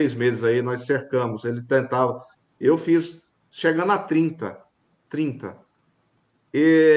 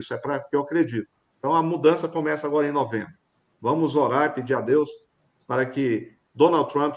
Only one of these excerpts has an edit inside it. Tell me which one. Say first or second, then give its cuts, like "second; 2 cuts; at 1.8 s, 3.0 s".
first; 1 cut; at 2.3 s